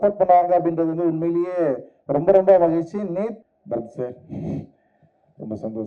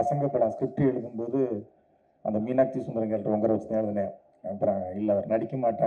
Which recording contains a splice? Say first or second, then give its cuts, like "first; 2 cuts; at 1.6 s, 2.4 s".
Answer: first; 1 cut; at 3.4 s